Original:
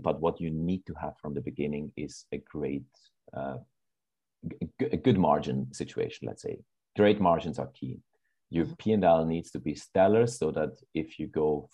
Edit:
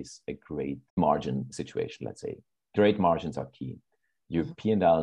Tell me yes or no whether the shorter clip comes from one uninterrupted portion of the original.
no